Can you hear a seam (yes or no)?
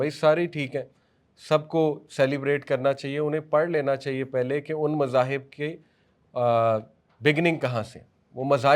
no